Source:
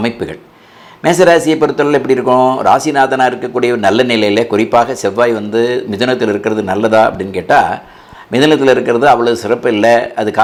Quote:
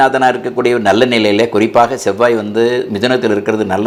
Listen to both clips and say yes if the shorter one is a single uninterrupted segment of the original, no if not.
yes